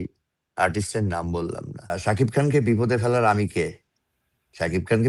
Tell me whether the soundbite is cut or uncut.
cut